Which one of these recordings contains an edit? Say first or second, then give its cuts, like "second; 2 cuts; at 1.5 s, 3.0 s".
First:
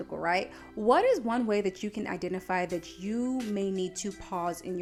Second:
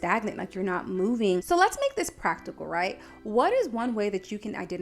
second; 1 cut; at 1.4 s